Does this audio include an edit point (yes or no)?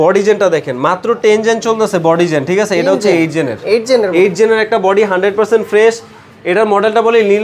no